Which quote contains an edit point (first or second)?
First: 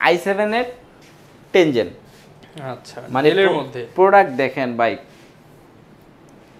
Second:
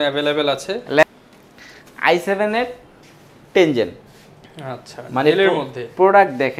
second